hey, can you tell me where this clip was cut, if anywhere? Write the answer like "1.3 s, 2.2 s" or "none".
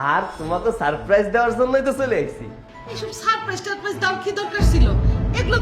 none